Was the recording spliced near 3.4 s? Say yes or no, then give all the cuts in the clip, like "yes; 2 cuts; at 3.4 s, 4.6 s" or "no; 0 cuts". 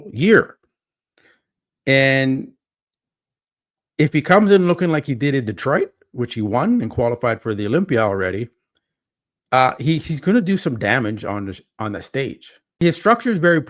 no; 1 cut; at 12.8 s